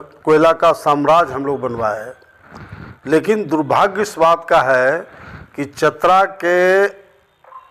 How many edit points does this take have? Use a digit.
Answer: 0